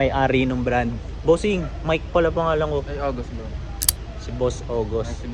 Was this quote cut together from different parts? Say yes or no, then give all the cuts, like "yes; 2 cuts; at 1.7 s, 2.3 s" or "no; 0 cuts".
no; 0 cuts